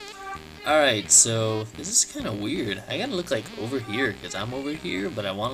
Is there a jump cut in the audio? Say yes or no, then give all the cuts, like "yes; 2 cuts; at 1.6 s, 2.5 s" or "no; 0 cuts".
no; 0 cuts